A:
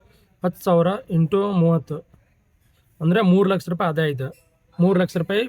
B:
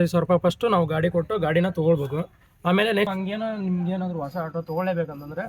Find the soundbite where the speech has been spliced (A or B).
B